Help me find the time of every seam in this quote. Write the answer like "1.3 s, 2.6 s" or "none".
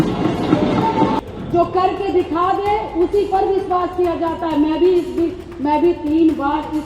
1.2 s